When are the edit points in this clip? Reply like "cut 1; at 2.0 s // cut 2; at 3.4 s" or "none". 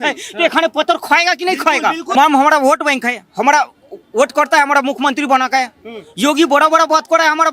cut 1; at 2.1 s

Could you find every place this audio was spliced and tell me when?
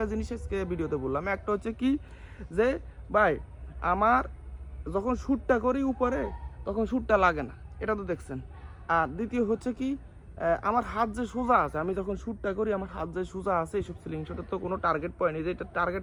none

